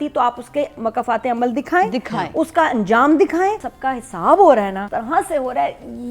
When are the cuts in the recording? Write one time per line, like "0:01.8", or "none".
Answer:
0:03.7
0:04.9